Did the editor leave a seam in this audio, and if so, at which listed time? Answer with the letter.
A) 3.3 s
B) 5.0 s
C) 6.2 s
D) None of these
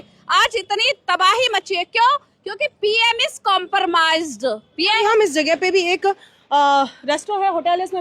B